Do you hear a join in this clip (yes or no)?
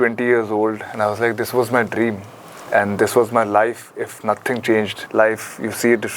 yes